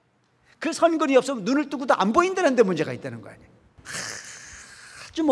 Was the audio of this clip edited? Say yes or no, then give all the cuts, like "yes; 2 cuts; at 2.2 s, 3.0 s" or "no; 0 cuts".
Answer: yes; 1 cut; at 3.8 s